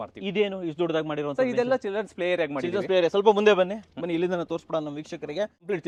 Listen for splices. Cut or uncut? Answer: uncut